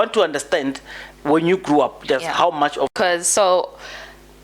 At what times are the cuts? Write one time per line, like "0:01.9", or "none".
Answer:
0:02.9